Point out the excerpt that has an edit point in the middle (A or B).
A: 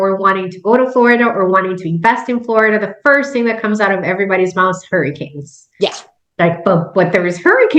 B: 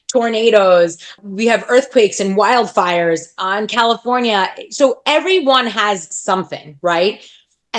B